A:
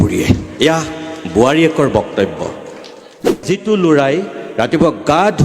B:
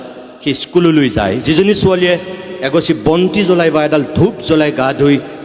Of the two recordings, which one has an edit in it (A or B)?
A